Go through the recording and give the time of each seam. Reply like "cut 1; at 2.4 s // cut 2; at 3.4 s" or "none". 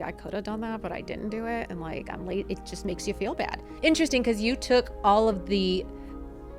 cut 1; at 3.6 s